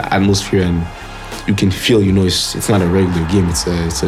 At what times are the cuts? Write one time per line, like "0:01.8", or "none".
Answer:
none